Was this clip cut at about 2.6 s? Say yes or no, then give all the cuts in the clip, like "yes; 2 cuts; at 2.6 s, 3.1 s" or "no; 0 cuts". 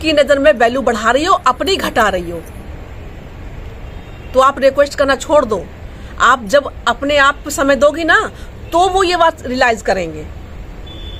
no; 0 cuts